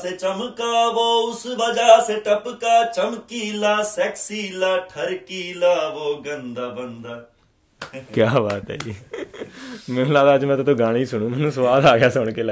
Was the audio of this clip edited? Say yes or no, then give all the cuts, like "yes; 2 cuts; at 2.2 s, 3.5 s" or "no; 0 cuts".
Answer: no; 0 cuts